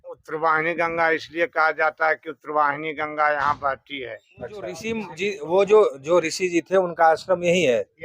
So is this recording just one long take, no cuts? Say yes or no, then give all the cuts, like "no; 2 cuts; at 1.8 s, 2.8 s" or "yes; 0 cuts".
no; 1 cut; at 5.1 s